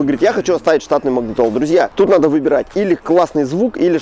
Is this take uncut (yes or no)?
no